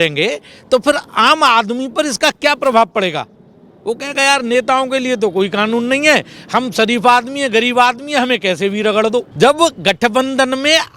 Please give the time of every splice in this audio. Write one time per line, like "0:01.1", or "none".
0:09.3